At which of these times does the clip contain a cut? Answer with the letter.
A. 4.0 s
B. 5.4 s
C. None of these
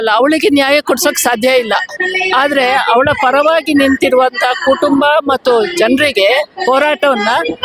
C